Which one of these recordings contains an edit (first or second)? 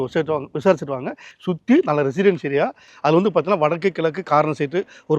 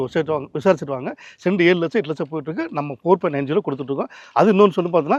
first